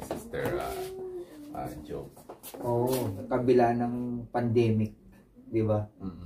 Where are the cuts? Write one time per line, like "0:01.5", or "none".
0:03.2